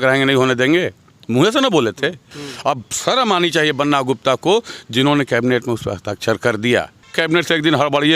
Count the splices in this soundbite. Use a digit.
2